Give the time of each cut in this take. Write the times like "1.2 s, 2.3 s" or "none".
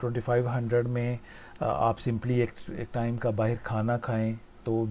none